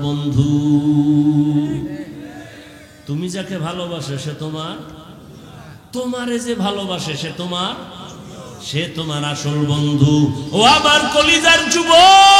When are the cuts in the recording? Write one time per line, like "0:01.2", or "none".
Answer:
0:10.4

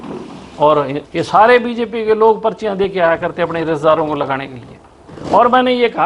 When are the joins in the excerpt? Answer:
0:01.0

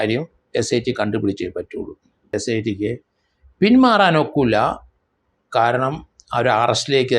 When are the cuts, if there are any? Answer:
0:02.3

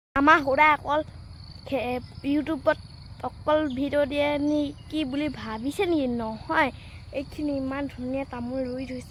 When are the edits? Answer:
none

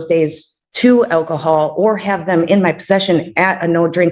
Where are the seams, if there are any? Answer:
none

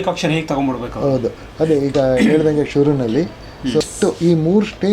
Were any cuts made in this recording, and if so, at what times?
0:03.8

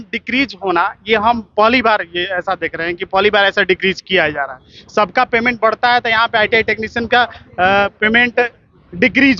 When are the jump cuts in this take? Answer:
none

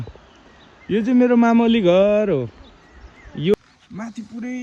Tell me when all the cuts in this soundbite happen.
0:03.6

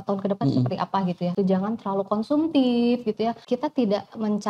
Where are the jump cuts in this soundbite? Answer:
0:01.3
0:03.4

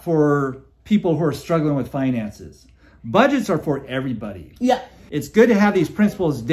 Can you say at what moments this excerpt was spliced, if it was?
none

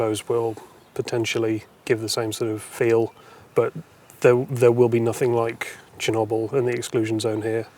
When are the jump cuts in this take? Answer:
0:01.7
0:02.7

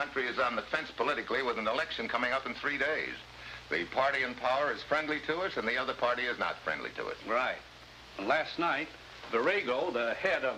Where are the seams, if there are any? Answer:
none

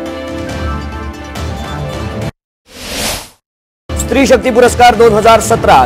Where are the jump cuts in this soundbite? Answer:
0:04.0

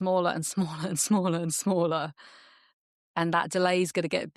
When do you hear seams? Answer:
none

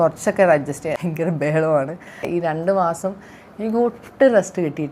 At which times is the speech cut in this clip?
0:02.3

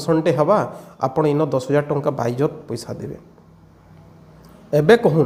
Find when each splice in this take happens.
none

